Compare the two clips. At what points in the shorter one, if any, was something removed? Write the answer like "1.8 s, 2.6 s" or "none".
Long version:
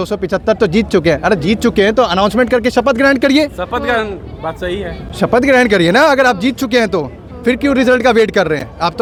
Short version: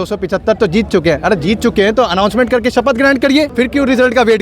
3.5 s